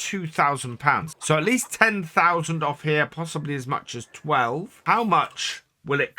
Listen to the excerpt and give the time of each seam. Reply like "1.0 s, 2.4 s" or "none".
1.1 s, 4.7 s